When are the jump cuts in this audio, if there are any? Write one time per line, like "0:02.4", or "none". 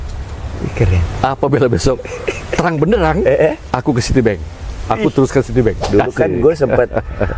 0:05.8